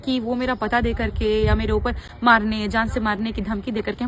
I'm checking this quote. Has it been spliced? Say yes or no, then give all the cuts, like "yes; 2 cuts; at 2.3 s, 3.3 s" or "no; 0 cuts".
no; 0 cuts